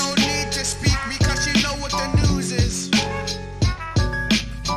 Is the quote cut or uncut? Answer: cut